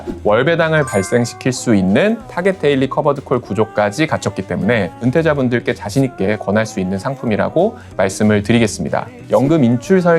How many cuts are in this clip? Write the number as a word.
three